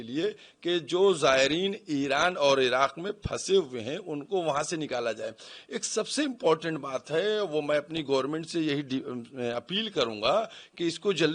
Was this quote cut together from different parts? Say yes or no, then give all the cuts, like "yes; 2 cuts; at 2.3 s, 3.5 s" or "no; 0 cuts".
no; 0 cuts